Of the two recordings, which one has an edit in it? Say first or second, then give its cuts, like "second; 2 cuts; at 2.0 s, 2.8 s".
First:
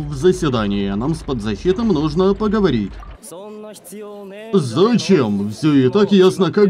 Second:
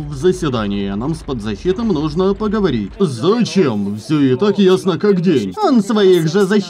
second; 2 cuts; at 2.9 s, 5.5 s